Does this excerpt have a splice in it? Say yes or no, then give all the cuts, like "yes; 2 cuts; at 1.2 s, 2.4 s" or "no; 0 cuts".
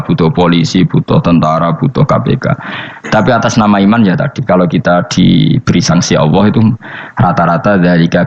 no; 0 cuts